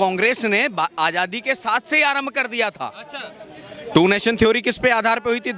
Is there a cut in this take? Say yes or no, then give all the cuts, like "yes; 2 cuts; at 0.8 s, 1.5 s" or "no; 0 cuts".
no; 0 cuts